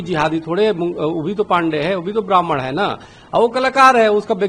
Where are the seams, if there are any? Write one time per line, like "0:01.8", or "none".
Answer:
none

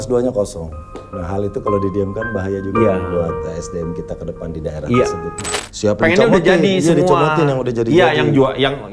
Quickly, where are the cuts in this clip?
0:05.5

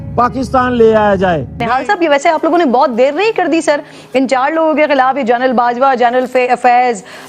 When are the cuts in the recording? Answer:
0:01.5

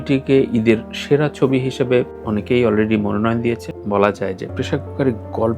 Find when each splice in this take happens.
0:03.7

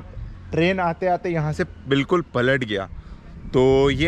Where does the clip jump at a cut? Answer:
none

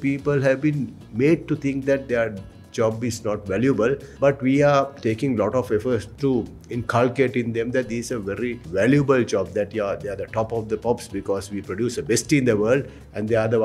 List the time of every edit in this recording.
0:04.1
0:06.1
0:08.6

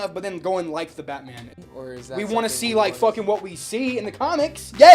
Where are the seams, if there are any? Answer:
0:01.4

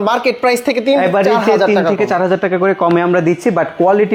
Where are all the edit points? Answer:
none

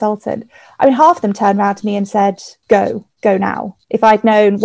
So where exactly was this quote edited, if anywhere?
0:02.5
0:03.7

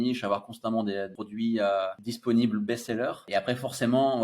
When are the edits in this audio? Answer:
0:01.2
0:02.1
0:03.2

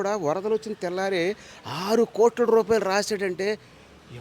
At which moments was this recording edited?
none

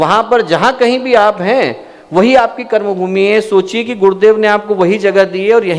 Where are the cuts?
none

